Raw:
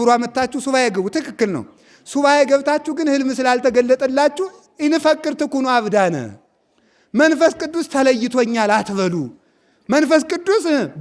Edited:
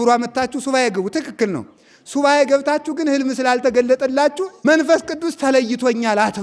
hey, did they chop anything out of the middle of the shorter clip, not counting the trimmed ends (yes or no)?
yes